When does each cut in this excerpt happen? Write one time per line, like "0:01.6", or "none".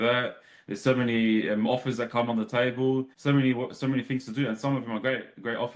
0:03.1